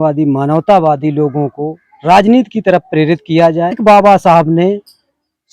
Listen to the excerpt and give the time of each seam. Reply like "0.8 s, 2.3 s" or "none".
3.8 s